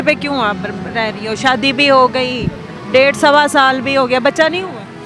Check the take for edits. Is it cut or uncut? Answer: uncut